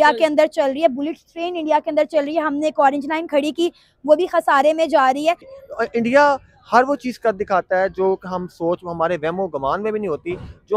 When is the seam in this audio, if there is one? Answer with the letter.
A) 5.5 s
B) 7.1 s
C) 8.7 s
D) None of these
A